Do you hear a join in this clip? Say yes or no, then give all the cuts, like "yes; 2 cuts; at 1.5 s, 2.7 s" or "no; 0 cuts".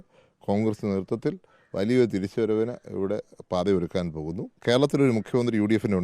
yes; 1 cut; at 4.5 s